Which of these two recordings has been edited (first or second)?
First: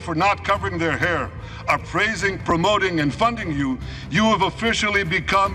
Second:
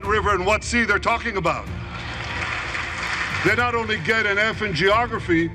second